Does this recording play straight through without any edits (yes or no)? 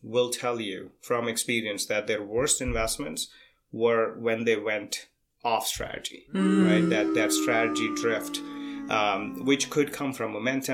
yes